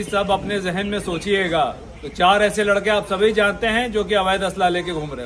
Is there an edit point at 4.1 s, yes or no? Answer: no